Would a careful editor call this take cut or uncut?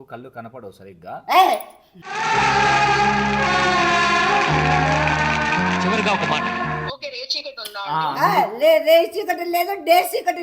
cut